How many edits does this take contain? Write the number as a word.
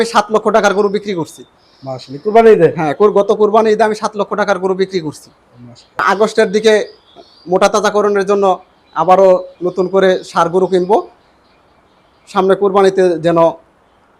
one